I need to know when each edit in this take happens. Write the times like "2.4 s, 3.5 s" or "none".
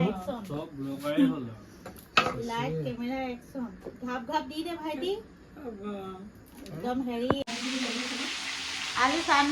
7.5 s

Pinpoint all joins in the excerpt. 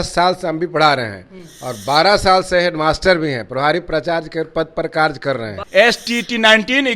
5.6 s

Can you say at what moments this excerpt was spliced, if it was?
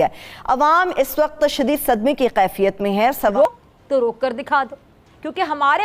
3.3 s

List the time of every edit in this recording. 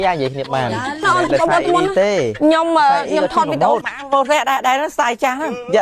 1.1 s

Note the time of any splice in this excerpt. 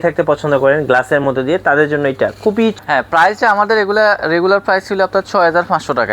2.8 s

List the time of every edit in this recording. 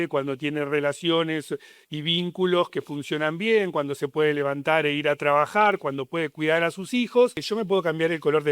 7.4 s

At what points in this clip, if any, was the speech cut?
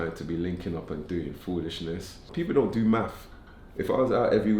2.3 s

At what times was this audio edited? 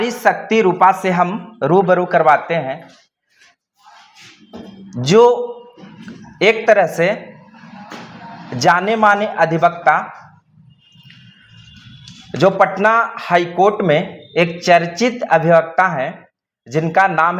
none

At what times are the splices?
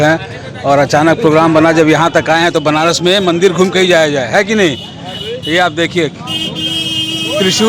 none

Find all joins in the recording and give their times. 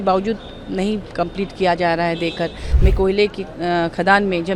2.6 s

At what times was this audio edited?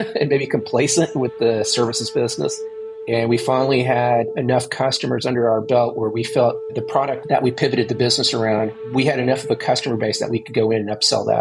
2.9 s, 6.9 s, 8.7 s

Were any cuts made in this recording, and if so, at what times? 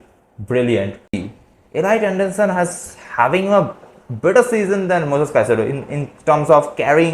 1.2 s

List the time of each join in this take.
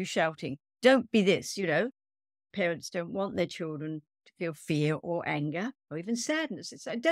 2.5 s

